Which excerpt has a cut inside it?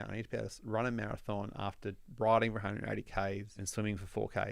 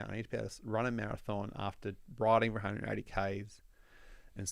first; 1 cut; at 3.6 s

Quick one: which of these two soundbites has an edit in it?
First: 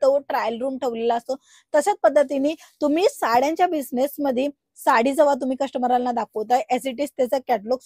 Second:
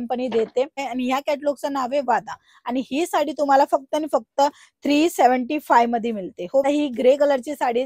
second; 2 cuts; at 0.9 s, 6.6 s

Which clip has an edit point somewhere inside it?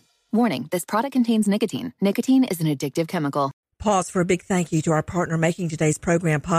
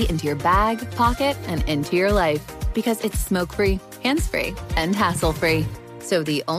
first; 1 cut; at 3.6 s

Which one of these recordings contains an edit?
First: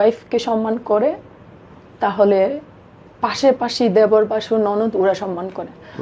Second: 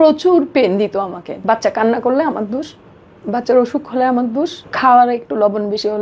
second; 2 cuts; at 1.2 s, 4.6 s

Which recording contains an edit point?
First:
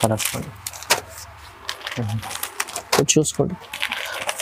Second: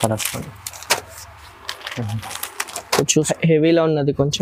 second; 1 cut; at 3.3 s

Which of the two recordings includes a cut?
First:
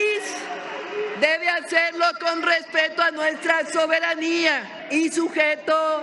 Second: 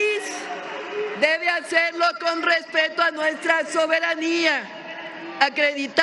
first; 1 cut; at 4.8 s

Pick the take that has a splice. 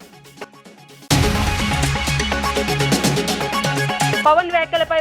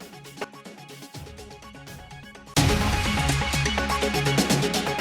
first; 2 cuts; at 0.9 s, 4.2 s

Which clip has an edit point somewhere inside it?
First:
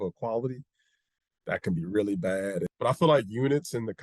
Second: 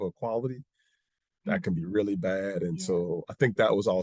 first; 1 cut; at 2.7 s

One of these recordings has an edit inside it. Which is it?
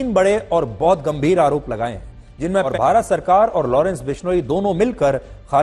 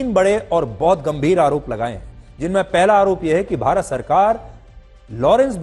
first; 1 cut; at 2.7 s

